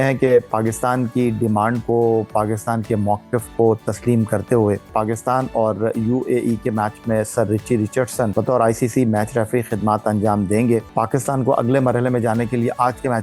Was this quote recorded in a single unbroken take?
no; 3 cuts; at 4.9 s, 8.3 s, 10.9 s

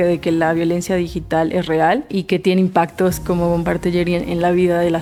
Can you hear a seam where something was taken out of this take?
no; 0 cuts

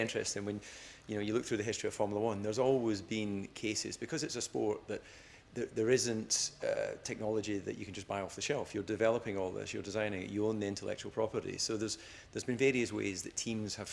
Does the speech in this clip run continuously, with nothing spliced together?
yes; 0 cuts

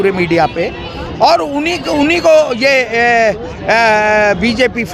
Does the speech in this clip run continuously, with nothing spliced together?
yes; 0 cuts

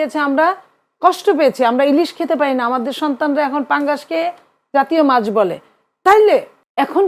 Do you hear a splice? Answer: no; 0 cuts

